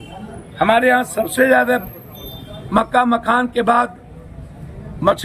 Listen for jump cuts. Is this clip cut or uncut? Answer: uncut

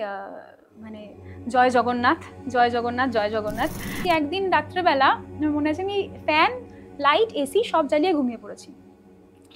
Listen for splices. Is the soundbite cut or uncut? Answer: cut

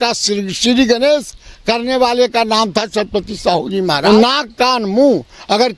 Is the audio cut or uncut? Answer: cut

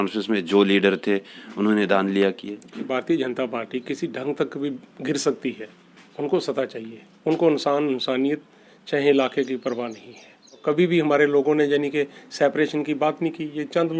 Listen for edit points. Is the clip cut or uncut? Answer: cut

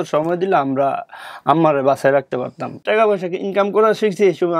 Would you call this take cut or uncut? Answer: cut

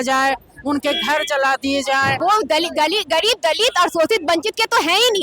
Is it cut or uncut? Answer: cut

